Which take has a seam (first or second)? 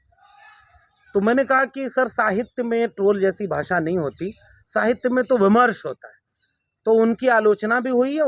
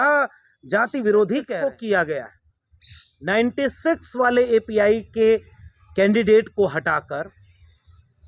second